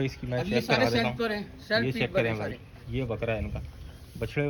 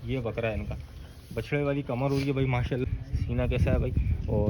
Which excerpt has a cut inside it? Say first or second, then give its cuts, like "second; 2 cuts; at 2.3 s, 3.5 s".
second; 1 cut; at 2.8 s